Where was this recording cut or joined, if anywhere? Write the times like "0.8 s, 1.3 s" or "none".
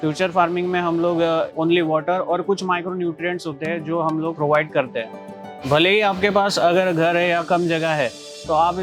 1.5 s, 4.3 s, 5.6 s

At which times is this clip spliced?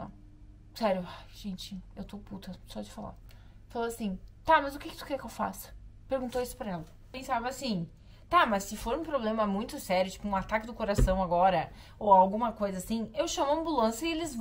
7.2 s

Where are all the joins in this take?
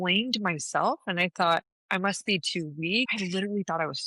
3.1 s

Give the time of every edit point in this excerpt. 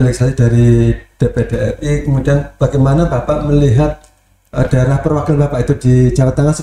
none

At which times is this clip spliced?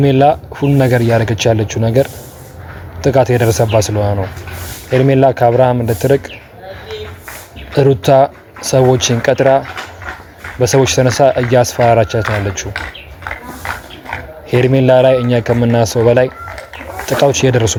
none

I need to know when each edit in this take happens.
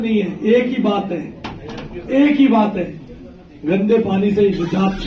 none

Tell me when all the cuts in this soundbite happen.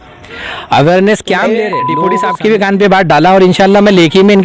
1.8 s

